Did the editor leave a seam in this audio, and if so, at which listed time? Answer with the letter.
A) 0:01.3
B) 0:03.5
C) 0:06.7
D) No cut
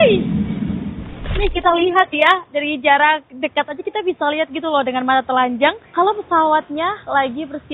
A